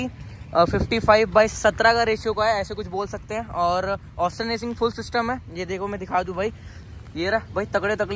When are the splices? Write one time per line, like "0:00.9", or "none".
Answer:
none